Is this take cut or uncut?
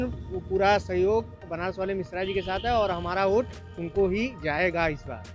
uncut